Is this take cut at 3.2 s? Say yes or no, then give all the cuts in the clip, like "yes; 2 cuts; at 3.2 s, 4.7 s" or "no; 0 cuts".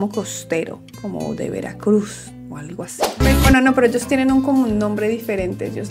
yes; 1 cut; at 3.2 s